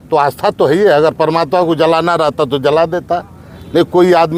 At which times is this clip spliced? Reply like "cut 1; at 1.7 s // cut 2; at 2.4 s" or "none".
none